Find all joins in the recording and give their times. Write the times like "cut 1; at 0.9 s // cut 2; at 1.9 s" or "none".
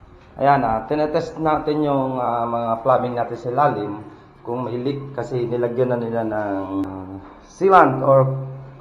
cut 1; at 6.8 s